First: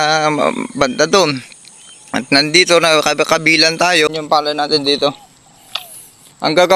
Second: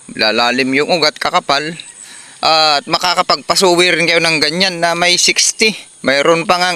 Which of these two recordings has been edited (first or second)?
first